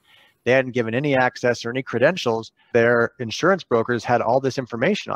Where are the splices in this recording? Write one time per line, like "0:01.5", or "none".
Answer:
0:02.7